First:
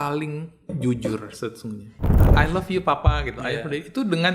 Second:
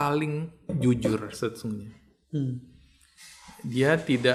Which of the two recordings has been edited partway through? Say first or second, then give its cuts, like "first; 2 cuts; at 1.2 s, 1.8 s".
first; 1 cut; at 2.2 s